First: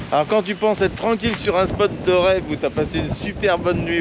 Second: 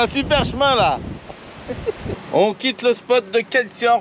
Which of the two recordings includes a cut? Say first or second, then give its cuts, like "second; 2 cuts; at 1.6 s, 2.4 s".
second; 1 cut; at 2.1 s